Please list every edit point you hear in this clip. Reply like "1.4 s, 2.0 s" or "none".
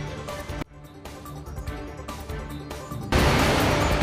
3.1 s